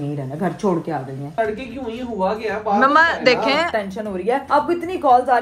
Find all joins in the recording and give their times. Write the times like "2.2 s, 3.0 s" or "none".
1.3 s, 4.0 s